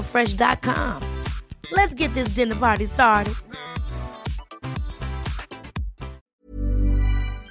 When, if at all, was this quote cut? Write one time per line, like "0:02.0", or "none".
0:06.2